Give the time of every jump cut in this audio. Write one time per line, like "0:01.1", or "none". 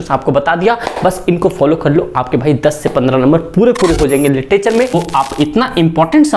0:04.9